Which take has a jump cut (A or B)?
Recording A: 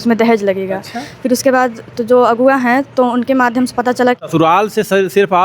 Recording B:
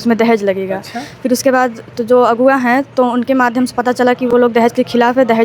A